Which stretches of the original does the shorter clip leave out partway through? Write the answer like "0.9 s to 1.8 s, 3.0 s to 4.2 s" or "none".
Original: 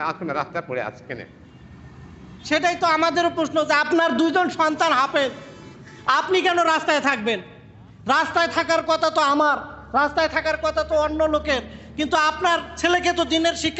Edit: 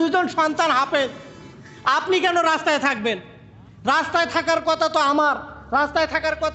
none